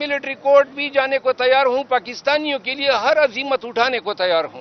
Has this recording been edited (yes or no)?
no